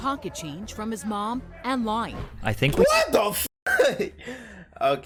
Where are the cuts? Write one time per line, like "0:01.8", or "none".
none

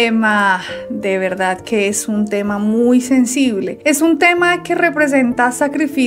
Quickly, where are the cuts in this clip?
none

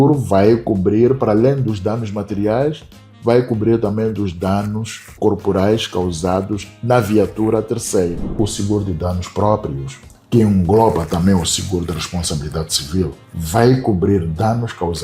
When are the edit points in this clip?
0:08.3

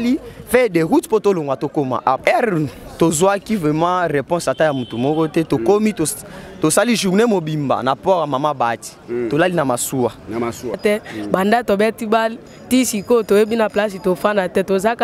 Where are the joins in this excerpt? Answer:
0:02.2
0:10.8

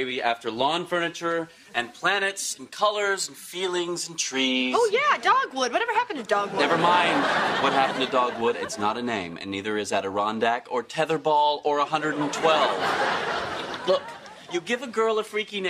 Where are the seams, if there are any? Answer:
0:08.3

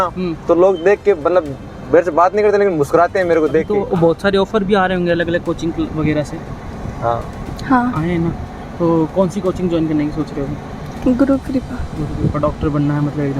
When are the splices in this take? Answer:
0:03.8

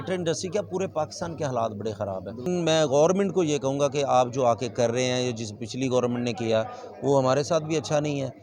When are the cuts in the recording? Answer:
0:02.5

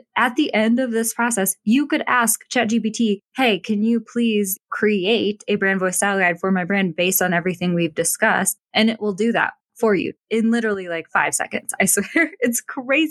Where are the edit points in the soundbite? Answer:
none

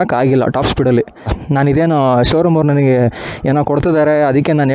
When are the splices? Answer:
0:01.4

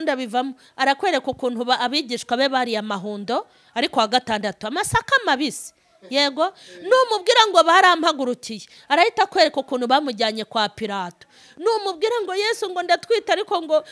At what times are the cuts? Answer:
none

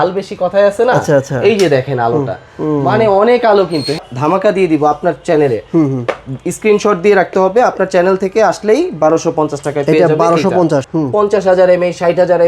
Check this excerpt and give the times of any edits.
0:04.0
0:10.9

